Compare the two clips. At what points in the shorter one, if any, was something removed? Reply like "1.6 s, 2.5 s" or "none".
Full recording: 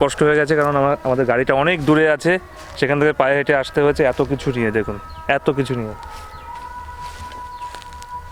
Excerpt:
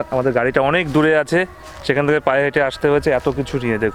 none